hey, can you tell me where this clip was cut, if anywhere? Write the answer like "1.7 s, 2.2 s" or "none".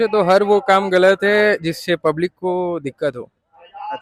none